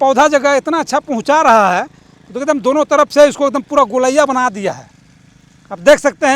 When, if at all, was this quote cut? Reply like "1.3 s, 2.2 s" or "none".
none